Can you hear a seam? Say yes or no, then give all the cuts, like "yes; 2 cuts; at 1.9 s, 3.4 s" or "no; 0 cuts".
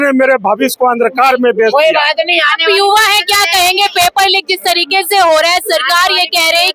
no; 0 cuts